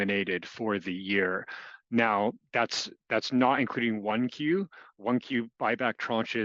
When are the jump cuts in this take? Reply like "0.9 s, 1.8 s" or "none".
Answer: none

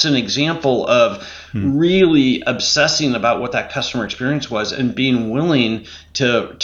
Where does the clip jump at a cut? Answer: none

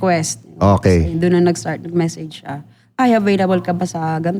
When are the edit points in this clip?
none

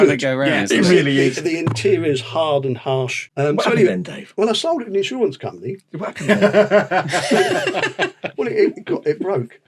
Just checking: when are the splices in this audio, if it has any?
3.2 s

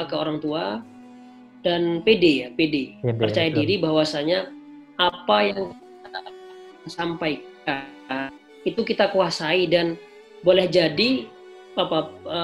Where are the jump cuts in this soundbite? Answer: none

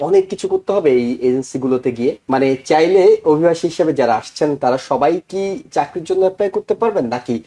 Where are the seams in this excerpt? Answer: 2.2 s

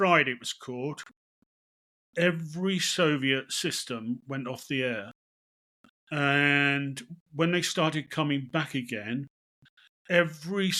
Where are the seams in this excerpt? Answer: none

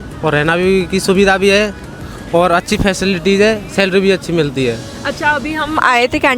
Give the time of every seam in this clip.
none

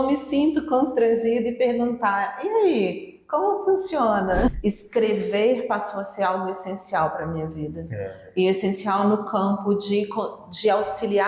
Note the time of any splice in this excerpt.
4.6 s

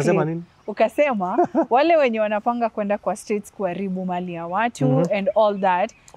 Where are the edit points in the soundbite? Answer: none

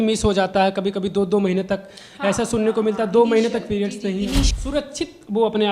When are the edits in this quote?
4.5 s

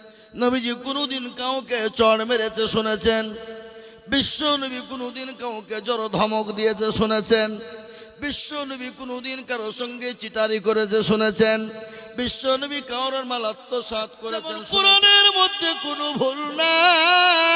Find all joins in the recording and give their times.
14.6 s

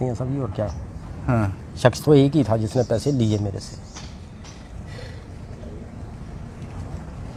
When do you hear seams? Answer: none

